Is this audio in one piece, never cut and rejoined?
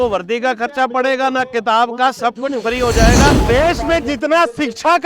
no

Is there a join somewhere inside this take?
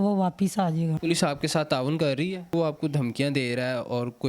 yes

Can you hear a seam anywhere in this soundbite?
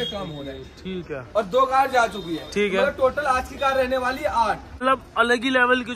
yes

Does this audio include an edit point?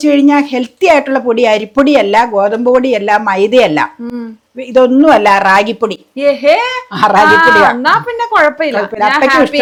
no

